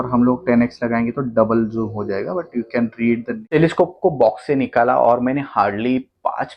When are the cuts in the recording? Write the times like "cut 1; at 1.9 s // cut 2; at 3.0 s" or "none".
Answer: cut 1; at 3.5 s